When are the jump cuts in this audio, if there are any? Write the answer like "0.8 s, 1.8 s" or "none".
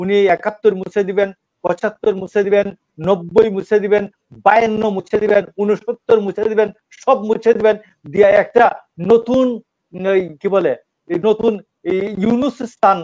none